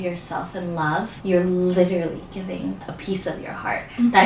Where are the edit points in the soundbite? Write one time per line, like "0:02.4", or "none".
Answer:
0:01.1
0:02.8